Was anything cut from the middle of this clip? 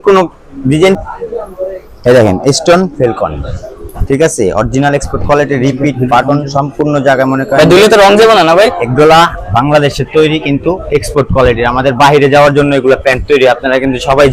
yes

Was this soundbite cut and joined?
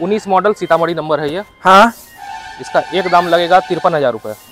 no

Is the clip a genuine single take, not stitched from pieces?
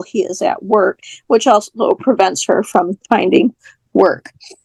yes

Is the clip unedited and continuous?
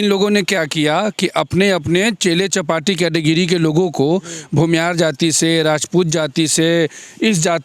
yes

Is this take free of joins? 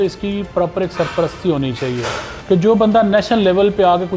no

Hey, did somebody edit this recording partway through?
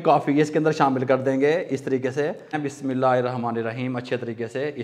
yes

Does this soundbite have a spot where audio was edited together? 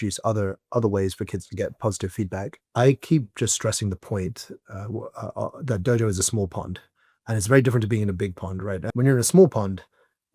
yes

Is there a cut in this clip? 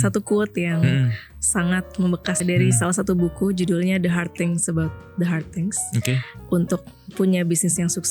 yes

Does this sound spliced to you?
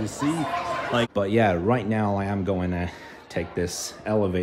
yes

